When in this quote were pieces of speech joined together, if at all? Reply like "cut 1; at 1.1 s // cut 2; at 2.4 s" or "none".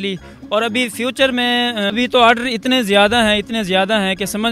cut 1; at 1.9 s

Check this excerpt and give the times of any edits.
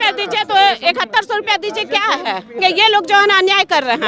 cut 1; at 2.6 s

